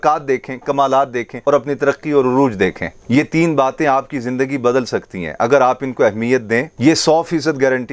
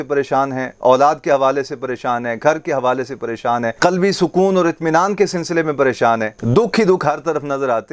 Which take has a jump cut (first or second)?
first